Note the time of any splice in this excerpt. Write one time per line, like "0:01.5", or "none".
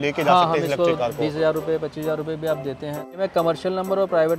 0:03.2